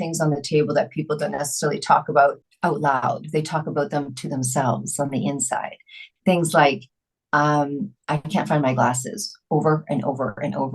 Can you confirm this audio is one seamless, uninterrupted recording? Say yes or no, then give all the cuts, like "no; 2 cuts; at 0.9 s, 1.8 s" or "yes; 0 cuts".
no; 1 cut; at 2.5 s